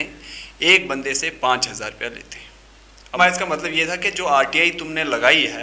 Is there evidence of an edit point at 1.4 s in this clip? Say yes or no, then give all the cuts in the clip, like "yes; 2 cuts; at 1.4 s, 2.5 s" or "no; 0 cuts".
no; 1 cut; at 3.2 s